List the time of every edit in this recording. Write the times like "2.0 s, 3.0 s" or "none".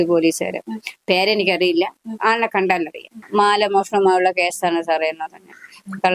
3.2 s